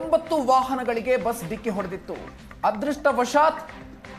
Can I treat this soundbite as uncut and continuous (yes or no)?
yes